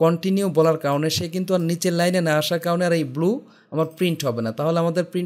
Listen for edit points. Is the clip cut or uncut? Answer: uncut